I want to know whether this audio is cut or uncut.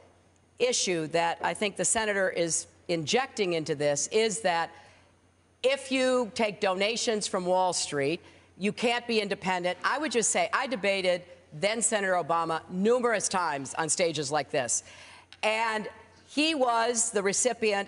cut